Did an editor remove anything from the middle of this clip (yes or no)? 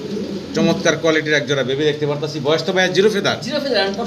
no